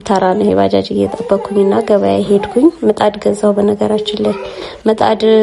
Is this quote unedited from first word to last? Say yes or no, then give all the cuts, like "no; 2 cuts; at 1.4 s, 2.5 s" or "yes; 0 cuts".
yes; 0 cuts